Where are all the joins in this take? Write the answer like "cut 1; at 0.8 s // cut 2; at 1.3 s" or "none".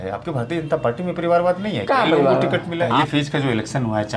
cut 1; at 2.8 s